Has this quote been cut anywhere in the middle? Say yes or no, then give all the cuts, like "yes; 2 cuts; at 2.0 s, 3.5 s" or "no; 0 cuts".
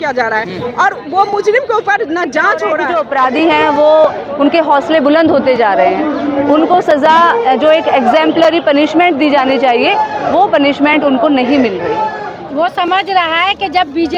yes; 2 cuts; at 2.9 s, 12.3 s